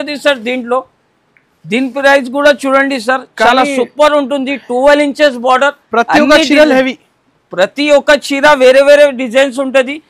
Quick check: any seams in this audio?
no; 0 cuts

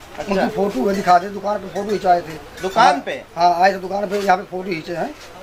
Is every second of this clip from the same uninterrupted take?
yes; 0 cuts

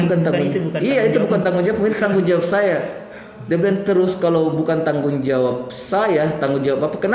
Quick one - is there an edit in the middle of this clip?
no; 0 cuts

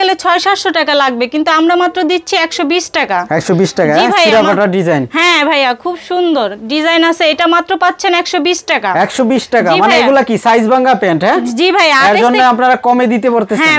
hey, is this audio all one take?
yes; 0 cuts

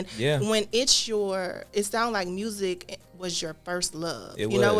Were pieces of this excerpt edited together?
no; 0 cuts

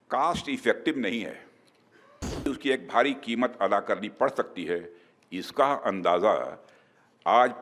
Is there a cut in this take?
yes; 1 cut; at 2.5 s

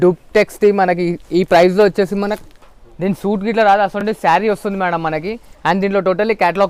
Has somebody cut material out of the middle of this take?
no; 0 cuts

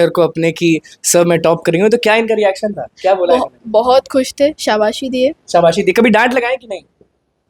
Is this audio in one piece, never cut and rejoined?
yes; 0 cuts

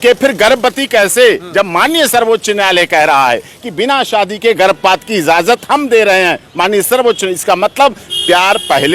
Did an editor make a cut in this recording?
no; 0 cuts

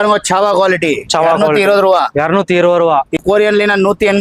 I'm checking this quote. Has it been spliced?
yes; 1 cut; at 3.2 s

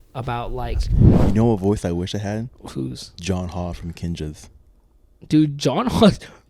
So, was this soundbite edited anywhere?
yes; 1 cut; at 1.0 s

